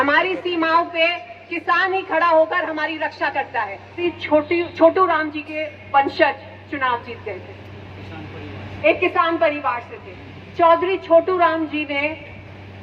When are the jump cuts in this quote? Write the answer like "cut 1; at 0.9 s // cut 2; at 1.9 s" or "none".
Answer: cut 1; at 4.0 s